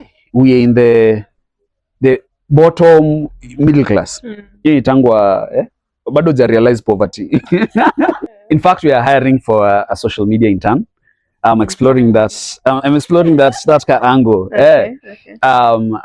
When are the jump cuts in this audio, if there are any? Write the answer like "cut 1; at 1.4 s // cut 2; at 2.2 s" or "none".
cut 1; at 8.3 s